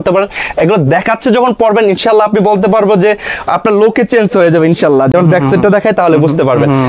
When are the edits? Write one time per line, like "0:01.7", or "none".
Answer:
none